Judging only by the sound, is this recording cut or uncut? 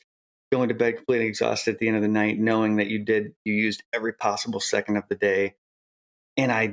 uncut